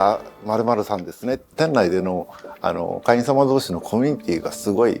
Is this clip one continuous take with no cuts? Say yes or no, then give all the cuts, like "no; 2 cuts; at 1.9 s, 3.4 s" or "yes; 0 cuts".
no; 1 cut; at 1.5 s